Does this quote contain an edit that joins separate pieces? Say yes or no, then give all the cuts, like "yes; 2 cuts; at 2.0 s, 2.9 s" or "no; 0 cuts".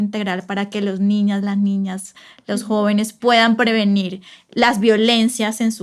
no; 0 cuts